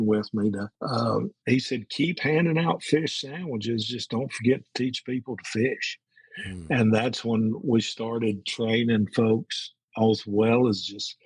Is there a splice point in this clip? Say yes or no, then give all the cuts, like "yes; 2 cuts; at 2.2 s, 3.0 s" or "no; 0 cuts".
yes; 1 cut; at 1.2 s